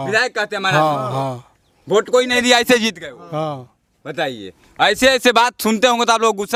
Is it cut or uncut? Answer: uncut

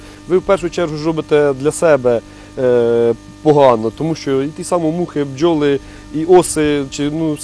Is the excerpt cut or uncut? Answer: uncut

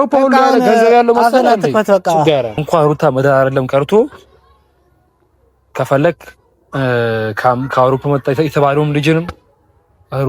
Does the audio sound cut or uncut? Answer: cut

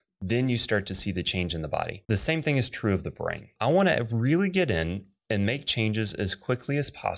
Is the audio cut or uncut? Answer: cut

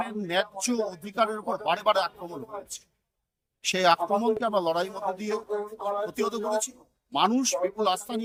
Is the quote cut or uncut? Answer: uncut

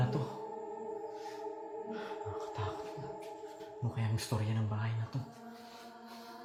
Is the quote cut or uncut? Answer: uncut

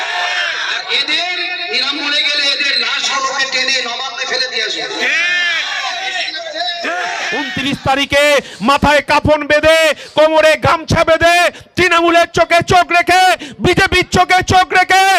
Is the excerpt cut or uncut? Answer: cut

